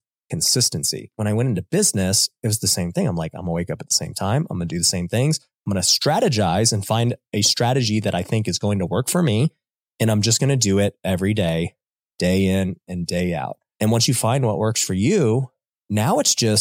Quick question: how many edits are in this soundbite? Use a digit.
2